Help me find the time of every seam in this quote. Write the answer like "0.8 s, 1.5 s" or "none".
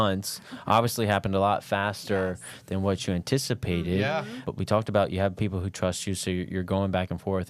4.4 s